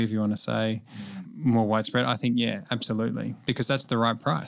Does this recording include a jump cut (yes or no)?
yes